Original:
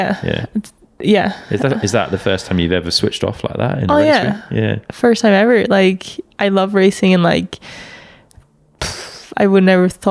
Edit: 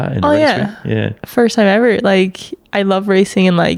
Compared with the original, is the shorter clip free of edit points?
yes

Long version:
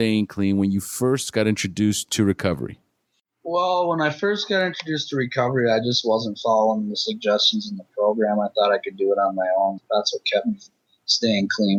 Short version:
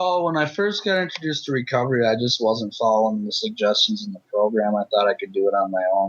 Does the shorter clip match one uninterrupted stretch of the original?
yes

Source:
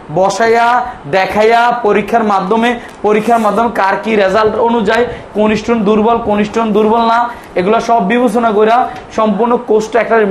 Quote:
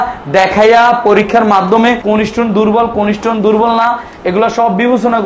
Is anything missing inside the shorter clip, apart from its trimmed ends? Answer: yes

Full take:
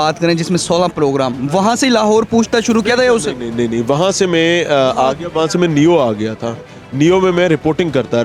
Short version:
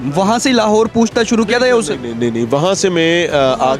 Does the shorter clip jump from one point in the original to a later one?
no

